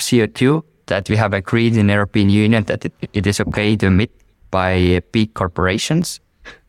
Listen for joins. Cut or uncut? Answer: uncut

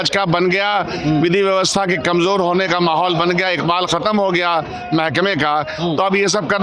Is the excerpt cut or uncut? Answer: uncut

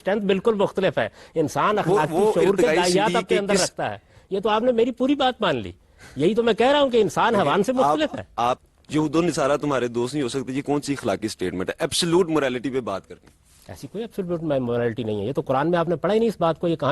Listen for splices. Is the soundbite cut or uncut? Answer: cut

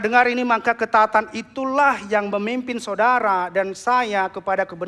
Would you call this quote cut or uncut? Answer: uncut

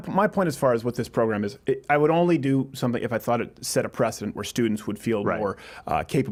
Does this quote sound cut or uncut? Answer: uncut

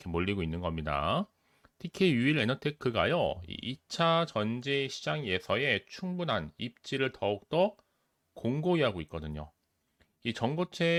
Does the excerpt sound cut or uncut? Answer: uncut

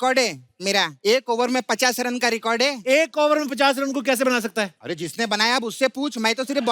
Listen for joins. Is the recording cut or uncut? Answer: cut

